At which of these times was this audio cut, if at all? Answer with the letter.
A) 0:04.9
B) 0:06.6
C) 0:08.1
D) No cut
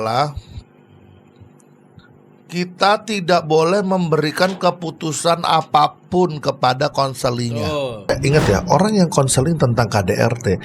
C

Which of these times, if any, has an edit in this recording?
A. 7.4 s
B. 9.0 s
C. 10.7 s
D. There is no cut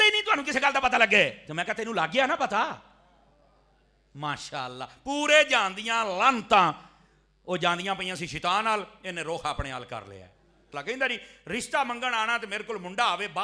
C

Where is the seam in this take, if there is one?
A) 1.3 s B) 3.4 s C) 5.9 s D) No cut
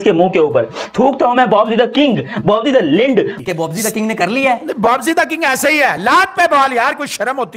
B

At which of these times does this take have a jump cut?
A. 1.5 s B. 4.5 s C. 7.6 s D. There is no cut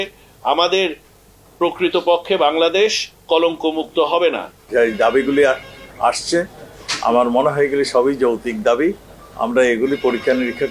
B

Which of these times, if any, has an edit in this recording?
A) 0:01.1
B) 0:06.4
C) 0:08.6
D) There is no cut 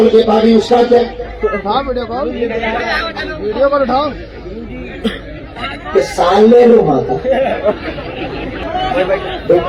C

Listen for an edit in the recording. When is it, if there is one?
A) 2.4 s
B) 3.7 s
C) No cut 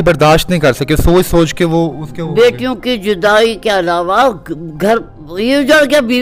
C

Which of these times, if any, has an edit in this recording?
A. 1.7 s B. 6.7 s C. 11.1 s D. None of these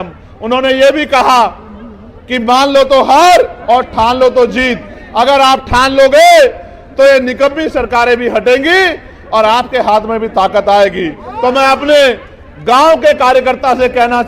D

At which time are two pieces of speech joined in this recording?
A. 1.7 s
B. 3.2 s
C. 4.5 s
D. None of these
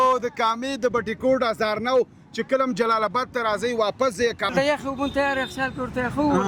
C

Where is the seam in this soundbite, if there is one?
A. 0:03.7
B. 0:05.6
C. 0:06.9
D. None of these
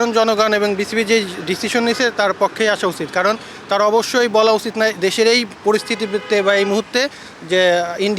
D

